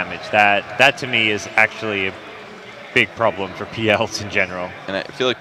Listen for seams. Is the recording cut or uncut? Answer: uncut